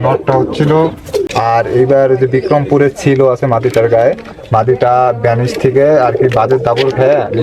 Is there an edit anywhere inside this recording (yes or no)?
yes